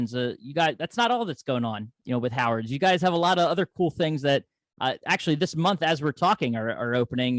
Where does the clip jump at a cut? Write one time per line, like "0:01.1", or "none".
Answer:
0:01.9